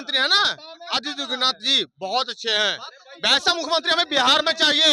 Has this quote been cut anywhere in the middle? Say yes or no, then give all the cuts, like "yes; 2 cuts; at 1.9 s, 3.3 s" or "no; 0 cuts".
no; 0 cuts